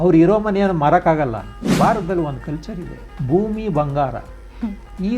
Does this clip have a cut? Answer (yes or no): yes